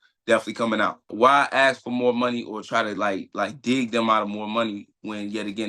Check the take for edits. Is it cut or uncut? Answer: cut